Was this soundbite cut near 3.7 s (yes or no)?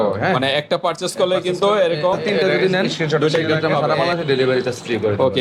yes